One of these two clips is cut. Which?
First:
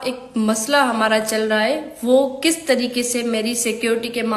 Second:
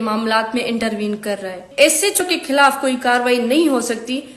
second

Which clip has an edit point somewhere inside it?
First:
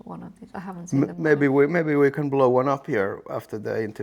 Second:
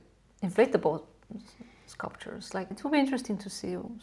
second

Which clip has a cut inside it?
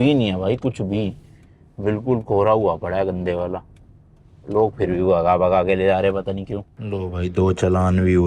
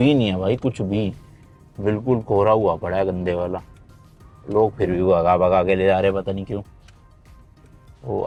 first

